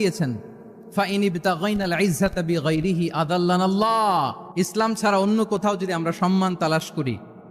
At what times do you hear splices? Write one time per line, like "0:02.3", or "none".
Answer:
0:04.4